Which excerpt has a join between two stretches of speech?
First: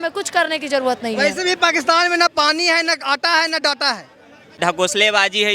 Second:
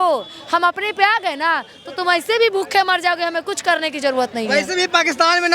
first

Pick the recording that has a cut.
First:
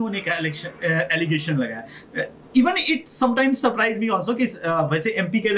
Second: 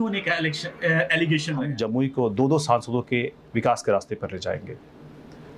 second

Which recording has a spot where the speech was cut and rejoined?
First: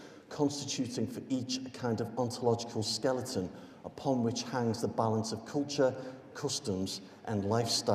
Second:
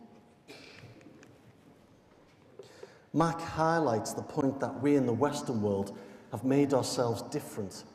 first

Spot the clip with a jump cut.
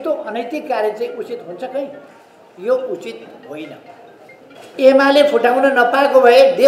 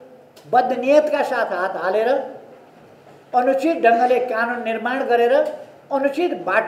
first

